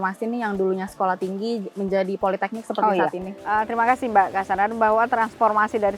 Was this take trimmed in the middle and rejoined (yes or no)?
no